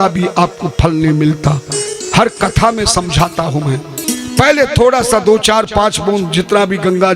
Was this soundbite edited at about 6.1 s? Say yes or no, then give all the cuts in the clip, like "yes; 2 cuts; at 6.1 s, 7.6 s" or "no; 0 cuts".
no; 2 cuts; at 1.9 s, 4.0 s